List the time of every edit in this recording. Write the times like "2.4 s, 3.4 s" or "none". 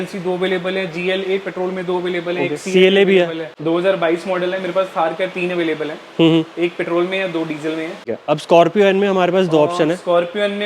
3.5 s, 8.0 s